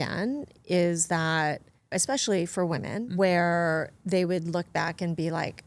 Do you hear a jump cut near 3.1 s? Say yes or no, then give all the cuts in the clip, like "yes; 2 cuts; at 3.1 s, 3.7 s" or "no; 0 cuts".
yes; 2 cuts; at 1.9 s, 3.1 s